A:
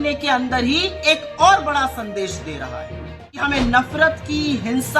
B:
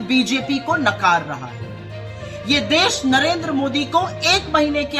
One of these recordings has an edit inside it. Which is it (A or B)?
A